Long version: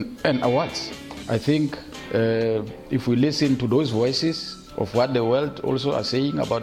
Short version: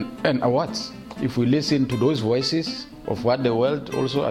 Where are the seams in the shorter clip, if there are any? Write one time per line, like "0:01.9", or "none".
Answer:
0:01.1